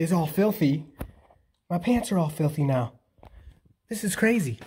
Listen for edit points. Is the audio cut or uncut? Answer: uncut